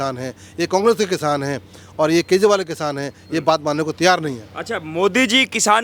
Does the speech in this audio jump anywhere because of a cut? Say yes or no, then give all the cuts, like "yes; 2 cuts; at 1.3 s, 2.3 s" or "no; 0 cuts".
no; 0 cuts